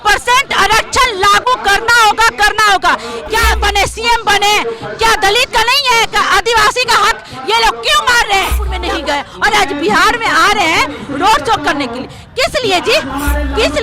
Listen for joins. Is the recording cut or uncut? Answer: cut